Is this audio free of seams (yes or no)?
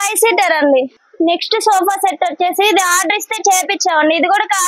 no